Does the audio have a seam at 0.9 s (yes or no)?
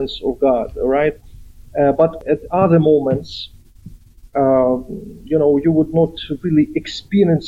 no